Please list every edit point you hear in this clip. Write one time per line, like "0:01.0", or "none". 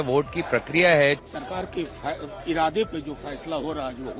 0:01.2